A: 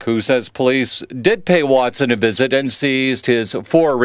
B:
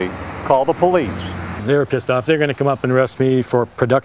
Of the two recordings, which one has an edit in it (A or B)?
B